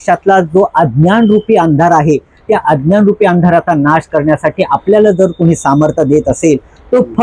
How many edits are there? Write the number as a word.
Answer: zero